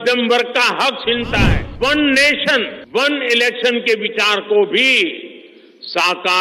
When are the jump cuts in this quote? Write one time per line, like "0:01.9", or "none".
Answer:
0:01.6
0:02.8